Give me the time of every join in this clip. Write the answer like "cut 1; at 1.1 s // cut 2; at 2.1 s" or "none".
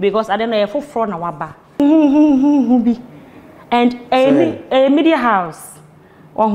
cut 1; at 1.8 s

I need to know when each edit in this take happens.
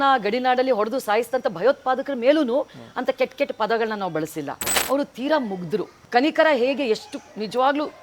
cut 1; at 4.7 s // cut 2; at 6.0 s

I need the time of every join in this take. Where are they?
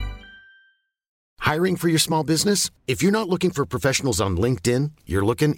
cut 1; at 1.2 s

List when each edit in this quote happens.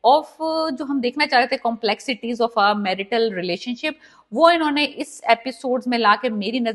none

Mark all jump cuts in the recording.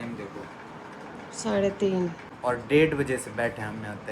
cut 1; at 2.3 s

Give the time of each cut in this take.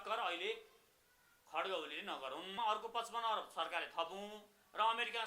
cut 1; at 2.5 s

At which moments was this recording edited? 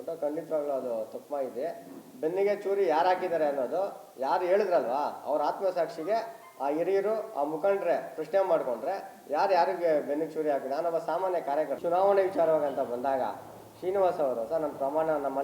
cut 1; at 11.8 s

